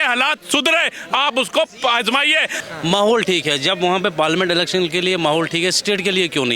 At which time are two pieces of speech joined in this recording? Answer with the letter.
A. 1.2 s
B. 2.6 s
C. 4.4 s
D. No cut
B